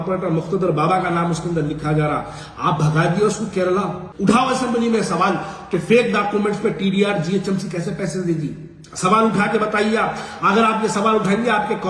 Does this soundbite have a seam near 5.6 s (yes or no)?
no